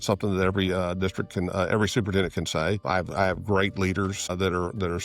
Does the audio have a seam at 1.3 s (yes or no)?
no